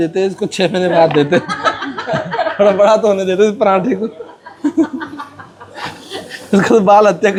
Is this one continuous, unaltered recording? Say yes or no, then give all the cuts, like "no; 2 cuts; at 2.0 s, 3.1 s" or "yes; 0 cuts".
yes; 0 cuts